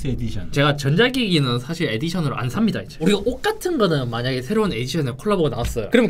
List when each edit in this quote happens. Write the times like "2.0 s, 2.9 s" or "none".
3.0 s